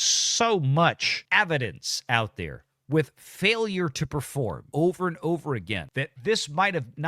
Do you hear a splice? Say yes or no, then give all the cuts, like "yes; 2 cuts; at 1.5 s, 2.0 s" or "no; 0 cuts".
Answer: yes; 2 cuts; at 1.1 s, 4.6 s